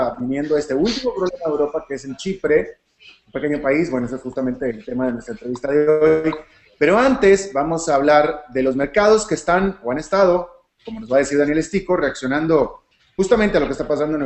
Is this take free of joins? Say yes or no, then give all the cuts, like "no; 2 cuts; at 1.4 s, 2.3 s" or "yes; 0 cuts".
no; 1 cut; at 4.2 s